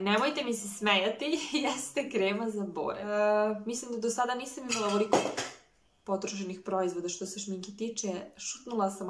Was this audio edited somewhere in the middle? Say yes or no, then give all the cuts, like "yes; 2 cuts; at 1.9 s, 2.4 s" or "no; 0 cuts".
yes; 1 cut; at 3.1 s